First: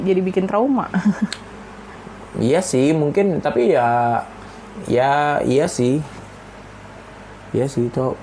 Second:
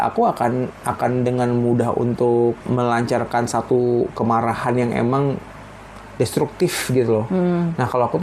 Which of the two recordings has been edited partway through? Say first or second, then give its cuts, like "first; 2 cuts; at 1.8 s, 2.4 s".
second; 1 cut; at 2.6 s